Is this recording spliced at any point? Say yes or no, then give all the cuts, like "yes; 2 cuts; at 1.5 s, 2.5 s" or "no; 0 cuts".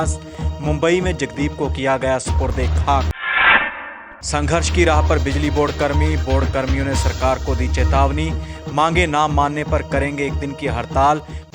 no; 0 cuts